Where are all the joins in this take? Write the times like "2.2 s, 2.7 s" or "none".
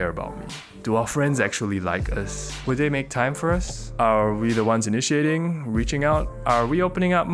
0.8 s, 6.3 s

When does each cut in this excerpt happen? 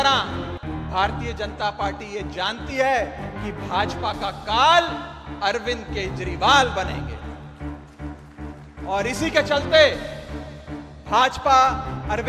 7.1 s, 8.8 s

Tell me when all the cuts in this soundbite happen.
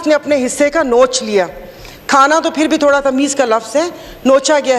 none

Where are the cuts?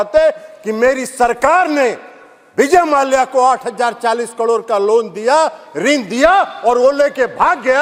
none

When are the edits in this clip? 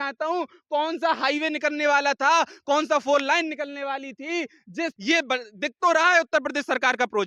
4.9 s

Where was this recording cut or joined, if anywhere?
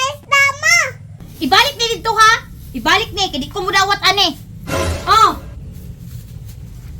1.2 s

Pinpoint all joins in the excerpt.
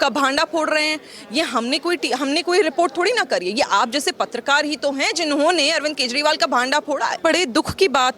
7.2 s

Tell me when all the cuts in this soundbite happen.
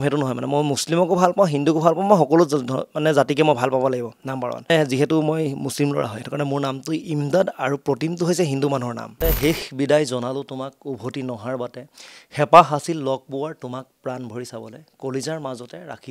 4.7 s, 9.2 s

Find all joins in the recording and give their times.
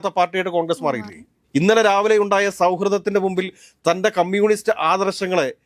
1.3 s

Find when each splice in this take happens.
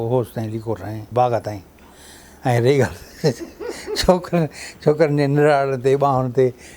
none

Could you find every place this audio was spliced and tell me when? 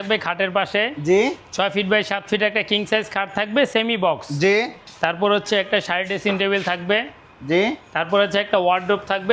none

